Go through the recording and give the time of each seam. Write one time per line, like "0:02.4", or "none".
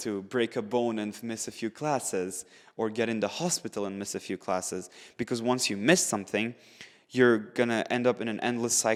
none